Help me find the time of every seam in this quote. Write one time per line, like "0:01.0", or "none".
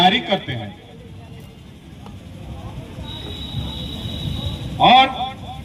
none